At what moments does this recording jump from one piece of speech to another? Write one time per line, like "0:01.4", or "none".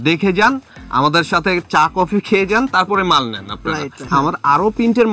0:04.1